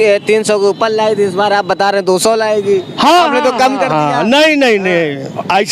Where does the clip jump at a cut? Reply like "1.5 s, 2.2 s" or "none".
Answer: none